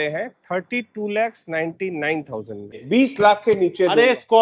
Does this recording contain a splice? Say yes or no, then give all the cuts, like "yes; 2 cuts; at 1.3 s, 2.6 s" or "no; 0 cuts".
yes; 1 cut; at 2.8 s